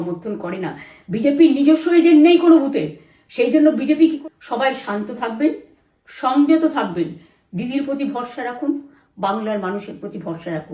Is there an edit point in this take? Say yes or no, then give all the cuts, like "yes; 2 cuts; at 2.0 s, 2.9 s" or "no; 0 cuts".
yes; 1 cut; at 4.2 s